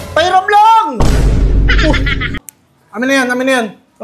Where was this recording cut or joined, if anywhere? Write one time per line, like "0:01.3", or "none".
0:02.3

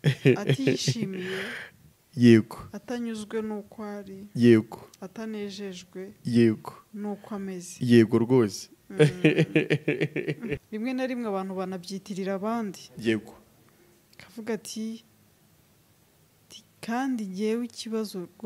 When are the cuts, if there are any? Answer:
0:10.6

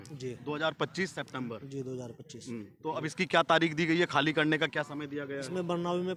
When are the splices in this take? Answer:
none

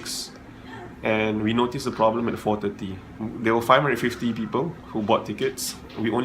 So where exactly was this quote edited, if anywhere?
0:03.2

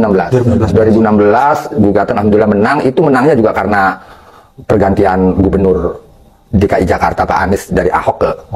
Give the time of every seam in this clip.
none

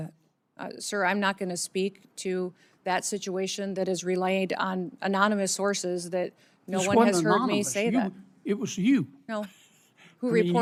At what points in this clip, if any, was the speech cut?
none

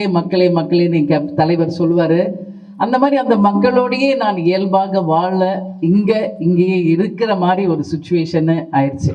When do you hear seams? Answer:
none

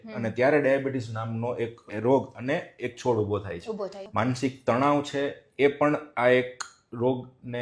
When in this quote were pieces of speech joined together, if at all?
0:04.0

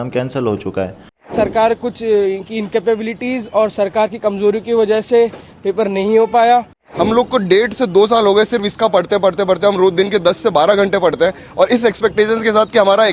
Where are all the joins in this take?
0:01.2
0:06.8

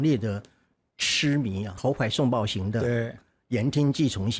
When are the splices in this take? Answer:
0:01.8

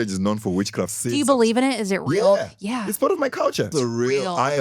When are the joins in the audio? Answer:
0:00.9
0:03.7

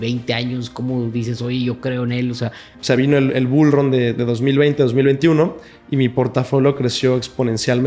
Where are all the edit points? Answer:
0:02.8

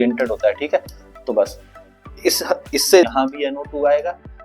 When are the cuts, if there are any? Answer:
0:03.0

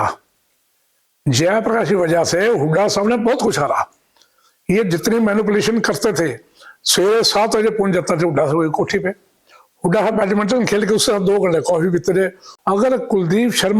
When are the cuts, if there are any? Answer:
0:12.5

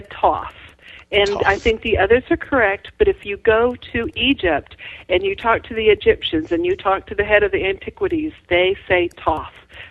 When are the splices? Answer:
none

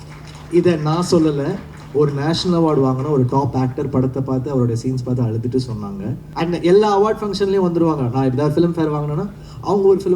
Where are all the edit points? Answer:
0:06.2

